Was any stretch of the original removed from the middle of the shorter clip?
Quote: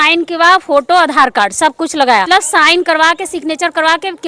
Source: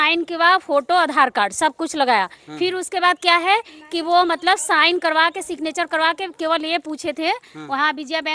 yes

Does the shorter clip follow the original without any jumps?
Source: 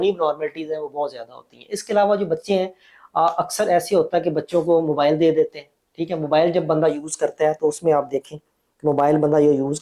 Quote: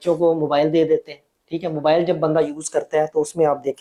yes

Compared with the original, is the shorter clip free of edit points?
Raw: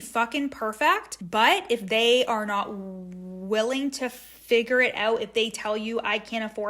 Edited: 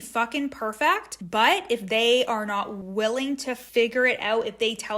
no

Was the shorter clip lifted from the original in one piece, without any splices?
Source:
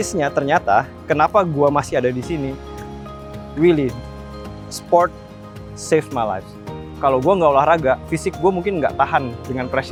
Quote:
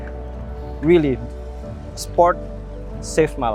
yes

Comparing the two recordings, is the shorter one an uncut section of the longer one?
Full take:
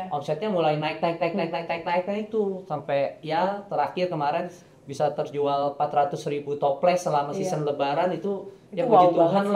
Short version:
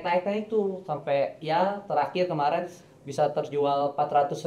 yes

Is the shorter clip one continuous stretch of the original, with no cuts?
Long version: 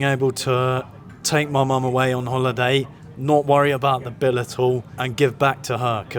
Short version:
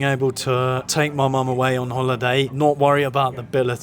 no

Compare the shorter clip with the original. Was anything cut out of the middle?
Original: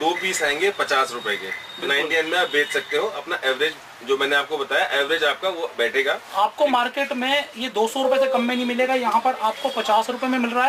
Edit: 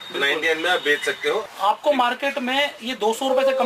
yes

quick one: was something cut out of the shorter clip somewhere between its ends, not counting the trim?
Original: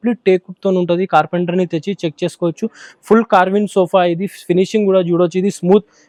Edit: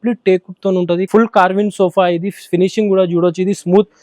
yes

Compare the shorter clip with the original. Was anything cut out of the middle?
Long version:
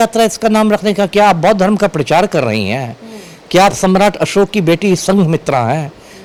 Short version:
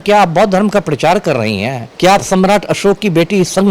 yes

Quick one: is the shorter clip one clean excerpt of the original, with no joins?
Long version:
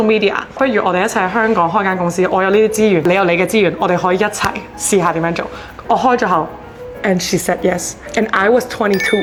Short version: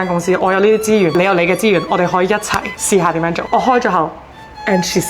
no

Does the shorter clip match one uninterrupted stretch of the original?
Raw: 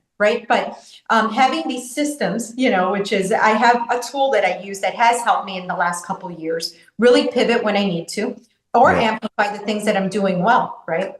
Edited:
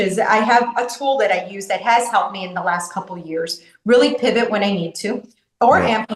yes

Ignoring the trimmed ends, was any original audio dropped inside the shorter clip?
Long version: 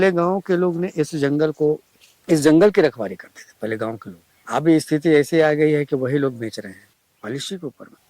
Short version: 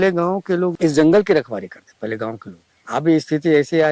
yes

